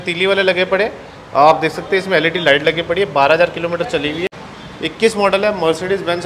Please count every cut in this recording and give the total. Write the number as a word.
one